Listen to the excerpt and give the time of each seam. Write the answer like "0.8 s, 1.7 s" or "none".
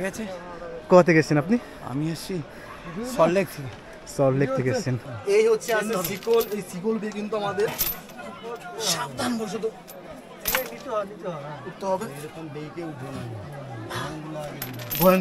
5.1 s